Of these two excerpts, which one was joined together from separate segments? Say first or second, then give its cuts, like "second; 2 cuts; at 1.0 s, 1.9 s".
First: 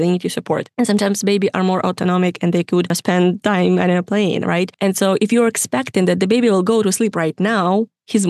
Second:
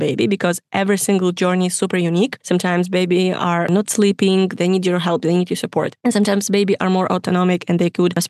second; 1 cut; at 3.7 s